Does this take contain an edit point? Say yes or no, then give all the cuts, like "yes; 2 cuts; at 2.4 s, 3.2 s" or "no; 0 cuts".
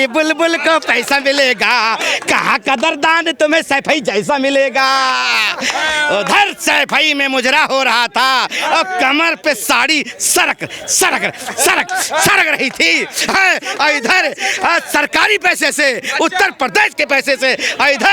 no; 0 cuts